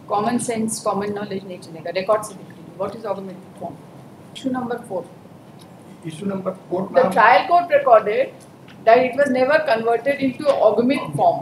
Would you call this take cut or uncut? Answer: cut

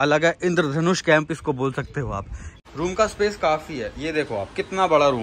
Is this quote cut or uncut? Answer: cut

